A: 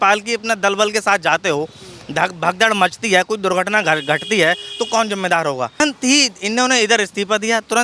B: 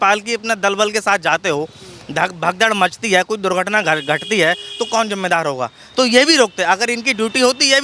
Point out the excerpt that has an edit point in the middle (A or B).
A